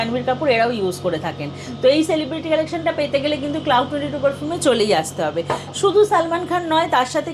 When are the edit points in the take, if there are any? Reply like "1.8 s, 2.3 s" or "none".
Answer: none